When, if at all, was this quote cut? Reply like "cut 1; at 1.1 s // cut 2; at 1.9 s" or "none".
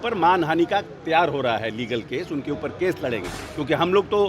cut 1; at 3.4 s